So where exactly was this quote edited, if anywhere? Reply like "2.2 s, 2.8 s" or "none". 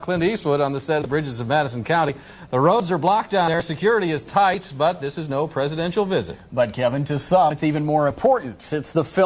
5.3 s